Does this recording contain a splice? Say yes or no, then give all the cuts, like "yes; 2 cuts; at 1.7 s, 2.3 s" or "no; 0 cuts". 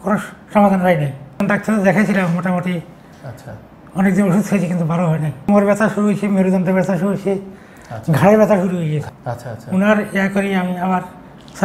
yes; 3 cuts; at 1.4 s, 5.5 s, 9.1 s